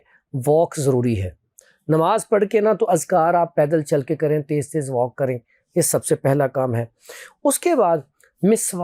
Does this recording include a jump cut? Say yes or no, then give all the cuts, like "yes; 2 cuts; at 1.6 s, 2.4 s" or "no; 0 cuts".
no; 0 cuts